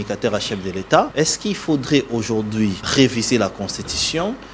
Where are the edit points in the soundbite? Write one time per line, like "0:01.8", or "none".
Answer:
0:01.1
0:02.9